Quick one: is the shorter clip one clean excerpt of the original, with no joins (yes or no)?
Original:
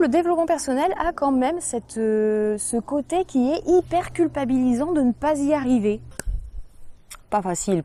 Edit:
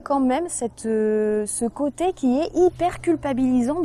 yes